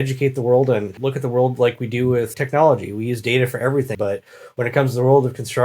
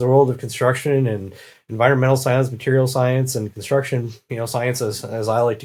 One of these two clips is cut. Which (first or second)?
first